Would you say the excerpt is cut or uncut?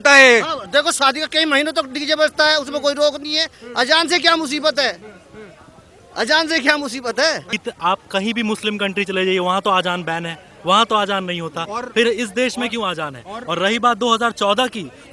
cut